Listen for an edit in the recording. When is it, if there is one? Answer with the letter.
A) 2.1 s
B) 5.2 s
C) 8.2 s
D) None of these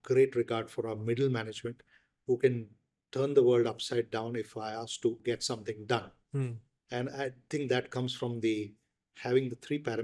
B